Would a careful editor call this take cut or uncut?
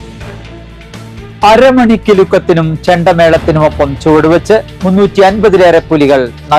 uncut